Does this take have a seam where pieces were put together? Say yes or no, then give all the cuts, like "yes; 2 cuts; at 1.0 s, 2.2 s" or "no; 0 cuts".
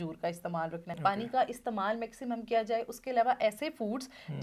yes; 1 cut; at 1.0 s